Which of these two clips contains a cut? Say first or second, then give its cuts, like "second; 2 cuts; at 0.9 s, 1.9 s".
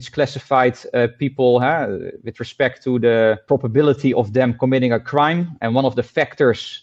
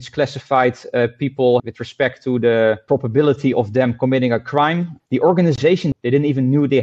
second; 3 cuts; at 1.6 s, 4.9 s, 5.9 s